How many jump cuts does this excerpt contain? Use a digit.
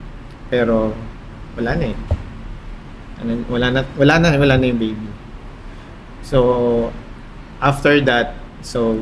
0